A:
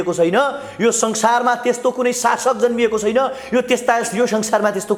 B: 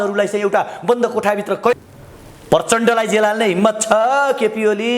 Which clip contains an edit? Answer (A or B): B